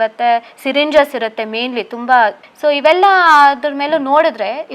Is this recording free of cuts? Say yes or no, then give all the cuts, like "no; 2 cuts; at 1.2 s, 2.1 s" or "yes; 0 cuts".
yes; 0 cuts